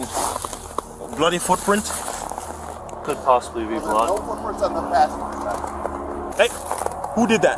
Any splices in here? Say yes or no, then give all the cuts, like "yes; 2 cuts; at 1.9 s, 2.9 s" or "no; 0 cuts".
yes; 2 cuts; at 3.0 s, 6.3 s